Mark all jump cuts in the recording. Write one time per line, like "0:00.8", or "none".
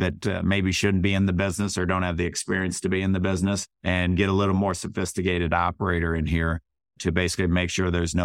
0:03.7
0:07.0